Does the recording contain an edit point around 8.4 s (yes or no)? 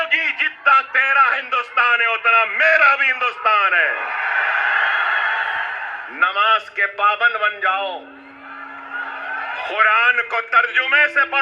no